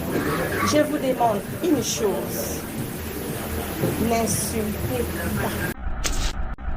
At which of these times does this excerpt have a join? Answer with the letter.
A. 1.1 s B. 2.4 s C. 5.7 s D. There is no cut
C